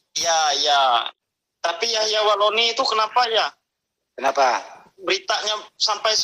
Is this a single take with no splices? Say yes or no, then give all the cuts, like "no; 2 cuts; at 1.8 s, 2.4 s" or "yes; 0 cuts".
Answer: no; 1 cut; at 1.1 s